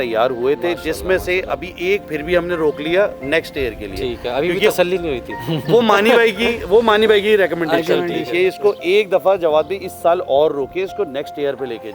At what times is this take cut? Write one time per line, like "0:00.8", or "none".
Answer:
none